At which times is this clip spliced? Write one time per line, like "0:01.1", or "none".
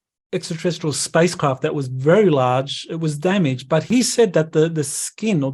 0:03.9

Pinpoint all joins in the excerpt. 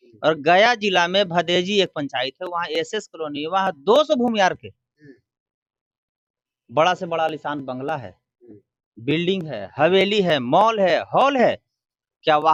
none

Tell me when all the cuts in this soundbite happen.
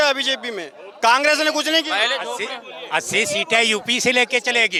none

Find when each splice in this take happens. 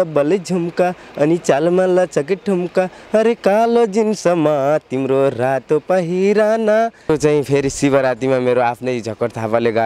0:07.1

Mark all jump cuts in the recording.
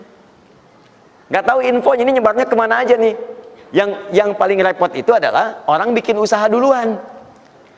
none

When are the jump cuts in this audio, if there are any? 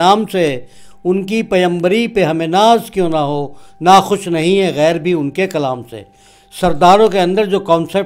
none

